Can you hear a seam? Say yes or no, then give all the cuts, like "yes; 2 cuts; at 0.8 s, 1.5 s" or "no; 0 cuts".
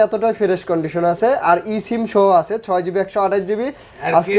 no; 0 cuts